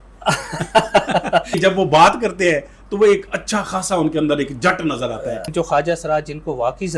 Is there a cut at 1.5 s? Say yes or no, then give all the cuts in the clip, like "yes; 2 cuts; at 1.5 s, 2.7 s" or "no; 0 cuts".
yes; 2 cuts; at 1.5 s, 5.5 s